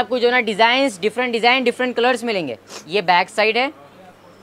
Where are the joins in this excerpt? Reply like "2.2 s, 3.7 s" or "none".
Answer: none